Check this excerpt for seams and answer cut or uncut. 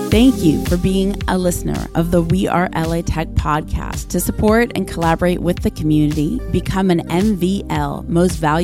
uncut